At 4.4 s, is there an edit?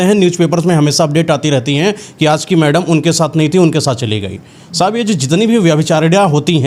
no; 0 cuts

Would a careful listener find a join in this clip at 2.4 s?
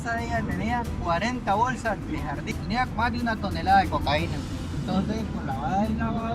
yes; 2 cuts; at 2.4 s, 4.7 s

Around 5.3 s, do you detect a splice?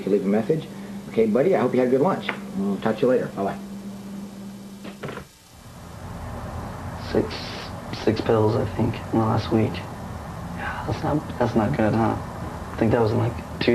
yes; 1 cut; at 5.3 s

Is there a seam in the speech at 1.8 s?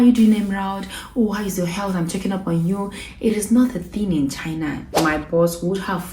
no; 1 cut; at 4.8 s

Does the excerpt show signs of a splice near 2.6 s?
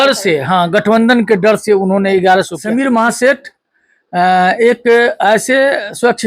yes; 1 cut; at 2.6 s

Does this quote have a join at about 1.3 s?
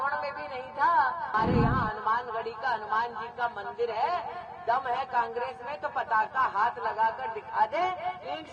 yes; 1 cut; at 1.3 s

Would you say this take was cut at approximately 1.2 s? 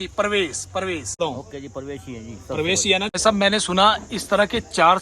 yes; 2 cuts; at 1.2 s, 3.1 s

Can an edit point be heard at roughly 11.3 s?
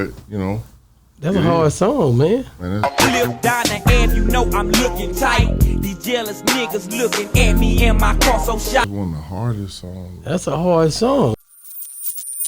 yes; 1 cut; at 11.3 s

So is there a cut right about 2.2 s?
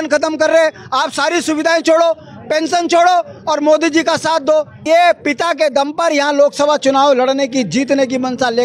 no; 1 cut; at 4.8 s

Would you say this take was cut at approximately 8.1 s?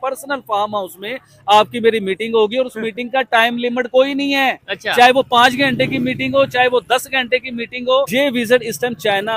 yes; 1 cut; at 8.1 s

